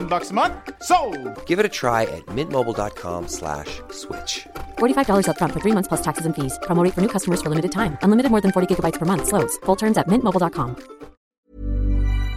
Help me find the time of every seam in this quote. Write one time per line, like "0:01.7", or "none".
0:11.2